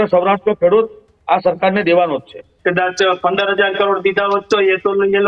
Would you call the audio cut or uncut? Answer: cut